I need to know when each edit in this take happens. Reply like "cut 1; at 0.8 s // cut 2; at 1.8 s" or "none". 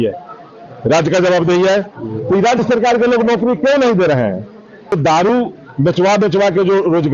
cut 1; at 4.9 s